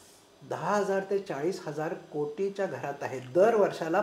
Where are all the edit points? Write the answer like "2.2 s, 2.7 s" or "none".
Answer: none